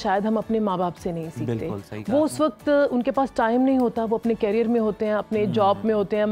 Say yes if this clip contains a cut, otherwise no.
no